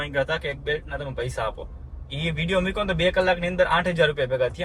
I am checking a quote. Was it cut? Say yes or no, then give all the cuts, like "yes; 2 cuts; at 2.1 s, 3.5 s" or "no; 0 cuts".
no; 0 cuts